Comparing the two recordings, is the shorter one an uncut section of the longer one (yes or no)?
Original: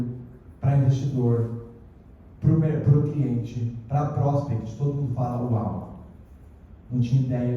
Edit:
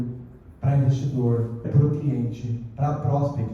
no